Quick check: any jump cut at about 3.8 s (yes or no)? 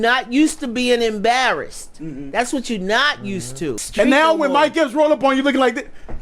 yes